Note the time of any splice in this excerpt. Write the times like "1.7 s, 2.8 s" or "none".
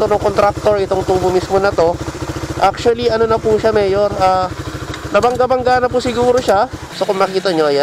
none

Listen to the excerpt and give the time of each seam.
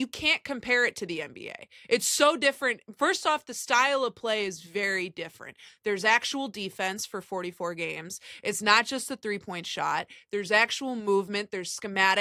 none

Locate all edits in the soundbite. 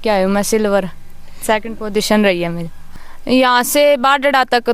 2.9 s

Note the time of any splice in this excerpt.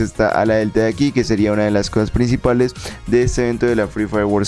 none

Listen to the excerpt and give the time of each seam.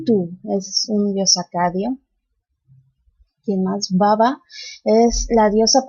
none

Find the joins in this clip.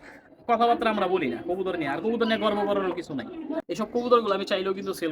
3.7 s

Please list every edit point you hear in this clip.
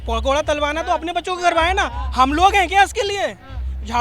none

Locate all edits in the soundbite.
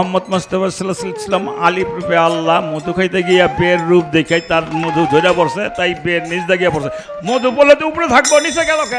none

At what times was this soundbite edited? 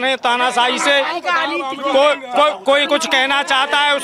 none

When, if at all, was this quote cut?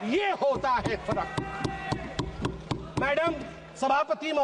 none

